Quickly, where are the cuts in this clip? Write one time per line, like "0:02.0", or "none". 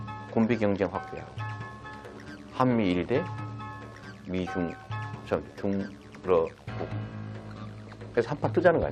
none